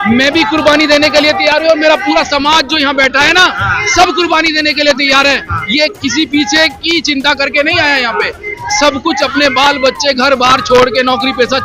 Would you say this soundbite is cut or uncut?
uncut